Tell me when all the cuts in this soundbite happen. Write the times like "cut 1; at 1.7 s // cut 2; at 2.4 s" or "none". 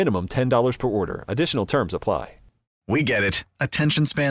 cut 1; at 2.7 s